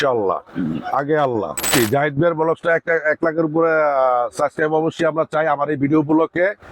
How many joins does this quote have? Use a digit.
1